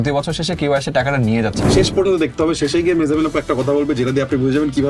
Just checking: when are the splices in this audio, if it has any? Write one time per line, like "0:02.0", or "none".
0:01.6